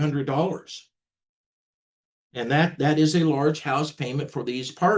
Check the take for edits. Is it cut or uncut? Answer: uncut